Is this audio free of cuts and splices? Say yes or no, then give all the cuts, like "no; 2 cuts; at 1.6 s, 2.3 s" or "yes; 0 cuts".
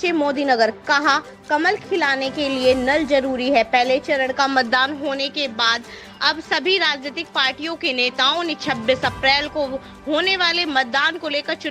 yes; 0 cuts